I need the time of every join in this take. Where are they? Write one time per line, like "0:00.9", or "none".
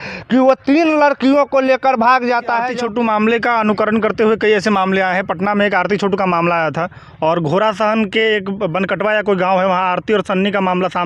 0:02.7